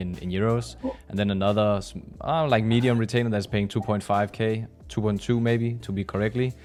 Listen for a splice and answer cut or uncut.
uncut